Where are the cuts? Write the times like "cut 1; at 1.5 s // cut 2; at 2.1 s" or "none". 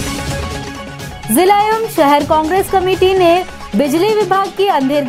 cut 1; at 1.2 s